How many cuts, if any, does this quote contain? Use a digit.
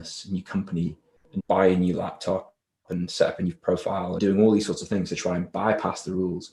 2